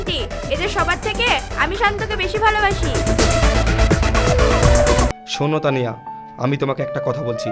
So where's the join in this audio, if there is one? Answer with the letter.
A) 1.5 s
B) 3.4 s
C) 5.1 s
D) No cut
C